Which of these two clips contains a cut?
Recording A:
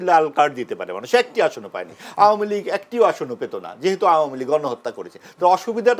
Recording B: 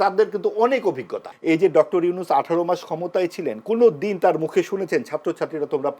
B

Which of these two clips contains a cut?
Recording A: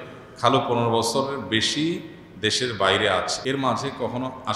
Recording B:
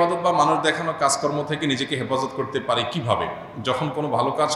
A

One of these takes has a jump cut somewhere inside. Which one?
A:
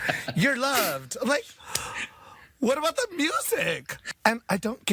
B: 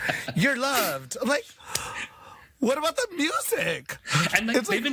A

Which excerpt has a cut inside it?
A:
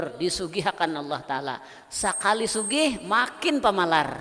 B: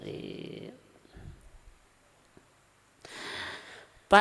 B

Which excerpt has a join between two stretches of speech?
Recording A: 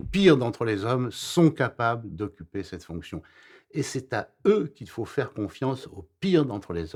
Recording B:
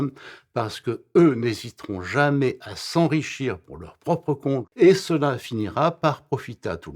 B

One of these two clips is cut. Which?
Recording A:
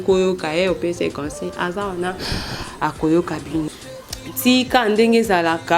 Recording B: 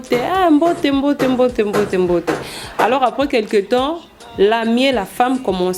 A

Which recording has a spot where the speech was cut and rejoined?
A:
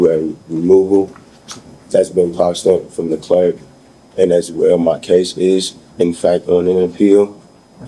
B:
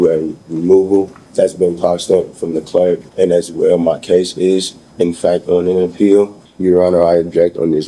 B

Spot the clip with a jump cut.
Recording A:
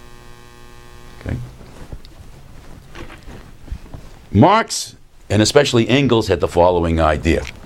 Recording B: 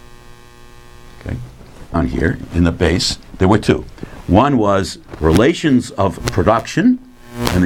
A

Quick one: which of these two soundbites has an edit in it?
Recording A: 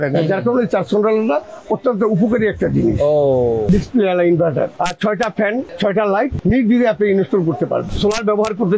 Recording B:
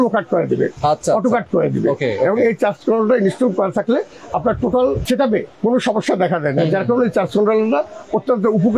A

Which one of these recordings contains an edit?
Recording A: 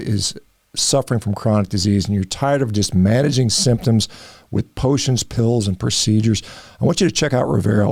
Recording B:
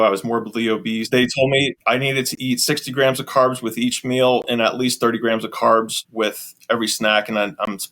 B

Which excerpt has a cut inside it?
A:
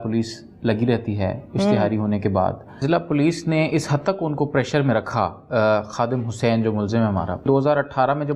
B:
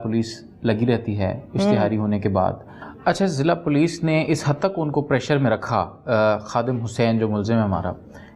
A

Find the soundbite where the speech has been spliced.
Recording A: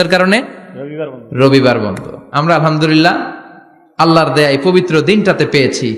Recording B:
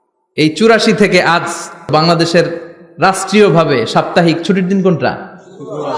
B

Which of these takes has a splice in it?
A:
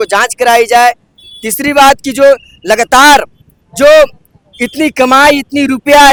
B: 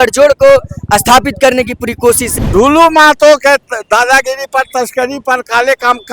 B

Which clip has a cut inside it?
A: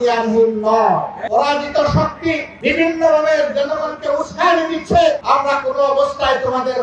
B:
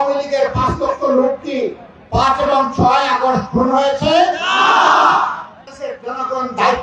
A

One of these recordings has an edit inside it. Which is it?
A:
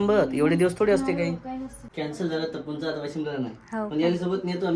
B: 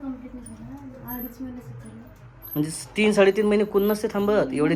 A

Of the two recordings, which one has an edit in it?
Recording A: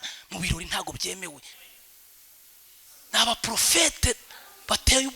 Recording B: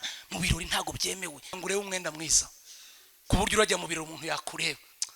A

